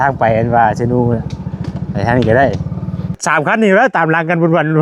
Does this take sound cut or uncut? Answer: cut